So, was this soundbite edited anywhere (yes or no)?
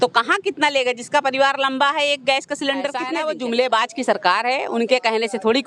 yes